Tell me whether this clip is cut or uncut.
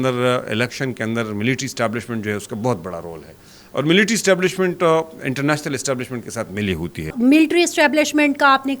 cut